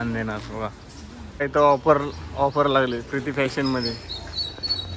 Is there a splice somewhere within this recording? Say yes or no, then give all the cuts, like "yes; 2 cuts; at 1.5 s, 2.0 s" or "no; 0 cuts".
yes; 1 cut; at 1.4 s